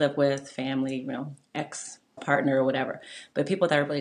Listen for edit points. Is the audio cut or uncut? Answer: cut